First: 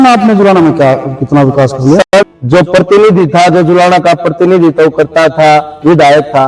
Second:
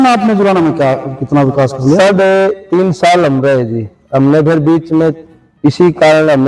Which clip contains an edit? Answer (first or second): first